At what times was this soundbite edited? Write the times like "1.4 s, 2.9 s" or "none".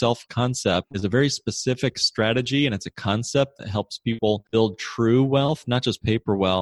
0.9 s, 4.4 s